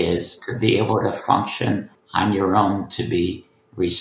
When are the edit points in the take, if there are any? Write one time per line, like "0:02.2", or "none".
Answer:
0:02.0